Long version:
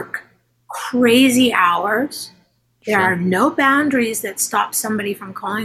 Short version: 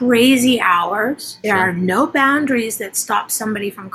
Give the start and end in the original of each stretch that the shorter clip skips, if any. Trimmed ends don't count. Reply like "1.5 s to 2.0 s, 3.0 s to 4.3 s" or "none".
2.2 s to 2.7 s